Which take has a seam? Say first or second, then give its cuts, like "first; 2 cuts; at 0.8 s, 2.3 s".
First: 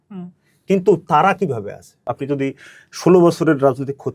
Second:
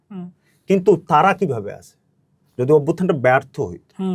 first; 1 cut; at 2.0 s